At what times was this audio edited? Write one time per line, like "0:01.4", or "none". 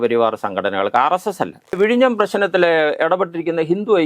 0:01.8